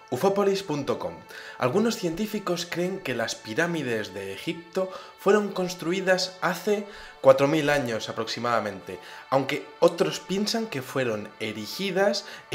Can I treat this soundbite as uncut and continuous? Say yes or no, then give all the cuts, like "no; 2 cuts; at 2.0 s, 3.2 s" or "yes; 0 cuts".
yes; 0 cuts